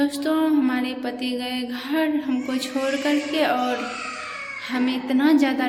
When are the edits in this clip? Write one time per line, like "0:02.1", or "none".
none